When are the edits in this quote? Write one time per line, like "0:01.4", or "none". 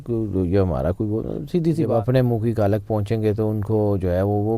0:01.9